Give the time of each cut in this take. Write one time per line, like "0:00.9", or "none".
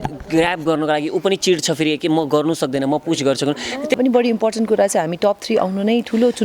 0:03.9